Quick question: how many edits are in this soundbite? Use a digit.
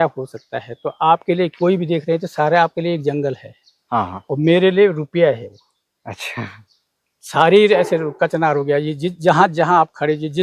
0